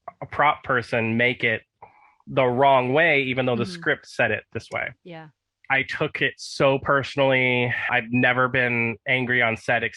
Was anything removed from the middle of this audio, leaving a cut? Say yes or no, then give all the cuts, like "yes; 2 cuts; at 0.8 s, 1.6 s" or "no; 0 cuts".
yes; 1 cut; at 5.6 s